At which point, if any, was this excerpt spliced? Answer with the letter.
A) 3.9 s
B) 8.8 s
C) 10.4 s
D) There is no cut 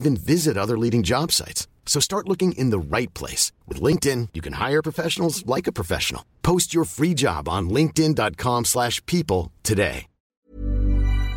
C